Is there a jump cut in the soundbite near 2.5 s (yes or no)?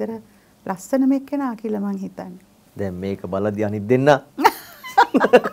no